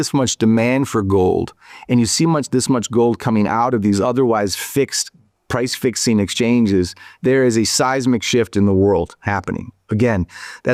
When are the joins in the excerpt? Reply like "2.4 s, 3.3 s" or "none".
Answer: none